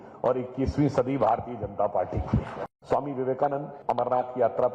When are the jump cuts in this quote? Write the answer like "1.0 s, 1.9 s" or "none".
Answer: 2.6 s, 3.7 s